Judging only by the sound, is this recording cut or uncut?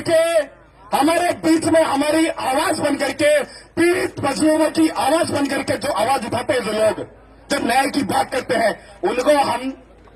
uncut